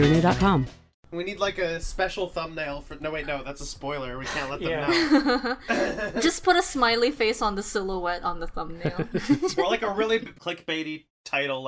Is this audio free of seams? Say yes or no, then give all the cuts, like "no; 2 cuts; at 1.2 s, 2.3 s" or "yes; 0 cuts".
no; 1 cut; at 0.9 s